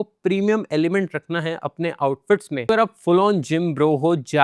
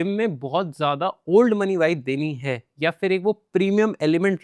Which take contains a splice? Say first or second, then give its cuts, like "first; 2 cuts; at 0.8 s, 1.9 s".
first; 1 cut; at 2.7 s